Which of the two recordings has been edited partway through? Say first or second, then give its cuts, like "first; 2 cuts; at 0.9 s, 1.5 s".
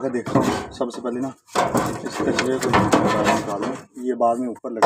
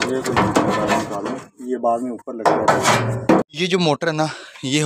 second; 1 cut; at 3.5 s